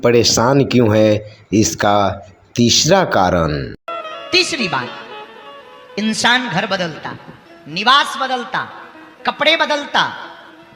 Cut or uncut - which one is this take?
uncut